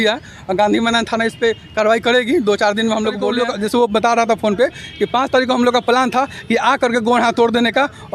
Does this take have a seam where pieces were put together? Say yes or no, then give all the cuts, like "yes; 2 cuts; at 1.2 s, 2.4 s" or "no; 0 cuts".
yes; 1 cut; at 3.3 s